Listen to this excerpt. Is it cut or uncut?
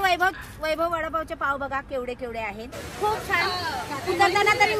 cut